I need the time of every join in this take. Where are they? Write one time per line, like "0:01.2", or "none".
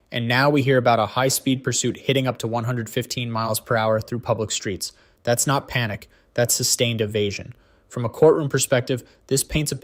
none